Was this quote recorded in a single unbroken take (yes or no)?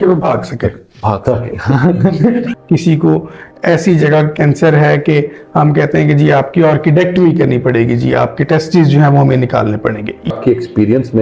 no